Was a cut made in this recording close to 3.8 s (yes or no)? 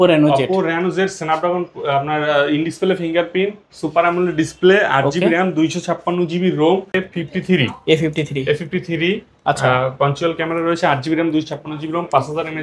no